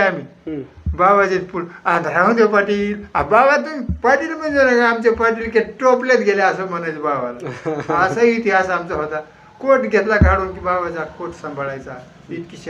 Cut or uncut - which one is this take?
uncut